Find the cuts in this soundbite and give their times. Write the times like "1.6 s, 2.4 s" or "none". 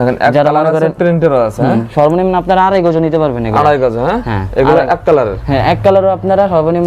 none